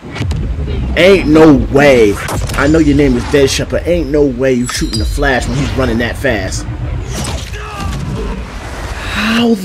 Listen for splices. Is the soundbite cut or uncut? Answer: uncut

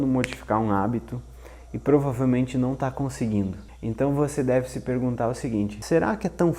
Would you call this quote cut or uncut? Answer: cut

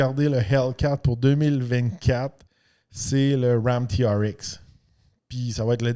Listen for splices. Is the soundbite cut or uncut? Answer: uncut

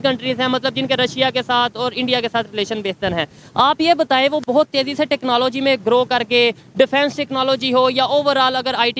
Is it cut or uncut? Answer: uncut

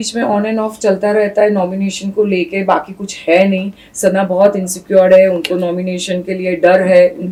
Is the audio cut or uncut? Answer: uncut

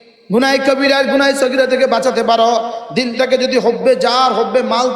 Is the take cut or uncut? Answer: uncut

